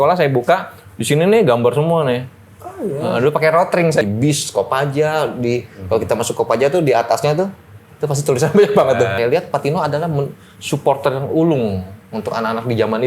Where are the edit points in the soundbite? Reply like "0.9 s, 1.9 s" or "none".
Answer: 4.0 s, 9.1 s

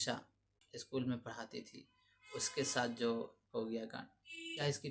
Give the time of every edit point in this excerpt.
none

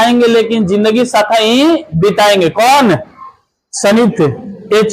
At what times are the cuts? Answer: none

